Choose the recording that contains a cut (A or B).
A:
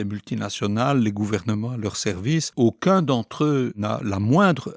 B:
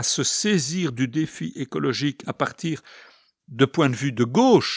A